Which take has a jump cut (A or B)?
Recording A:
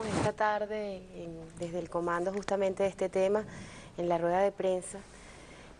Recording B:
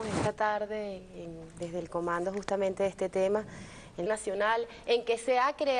A